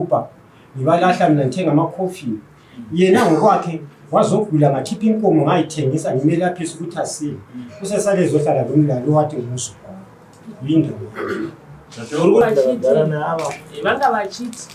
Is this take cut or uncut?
cut